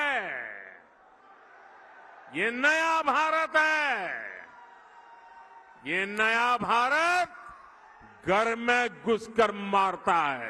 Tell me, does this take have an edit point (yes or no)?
no